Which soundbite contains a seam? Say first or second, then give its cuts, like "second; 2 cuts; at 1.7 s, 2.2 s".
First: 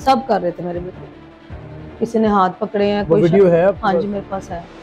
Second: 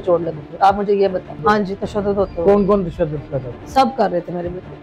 second; 1 cut; at 1.3 s